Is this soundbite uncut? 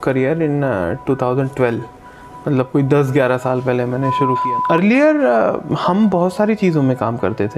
no; 1 cut; at 4.4 s

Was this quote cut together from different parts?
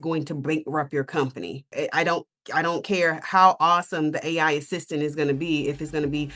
yes; 1 cut; at 1.7 s

